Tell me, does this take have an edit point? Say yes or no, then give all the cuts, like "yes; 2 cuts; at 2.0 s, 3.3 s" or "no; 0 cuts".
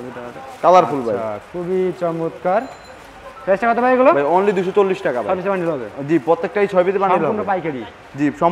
no; 0 cuts